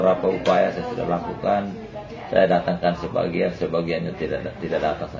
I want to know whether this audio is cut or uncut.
uncut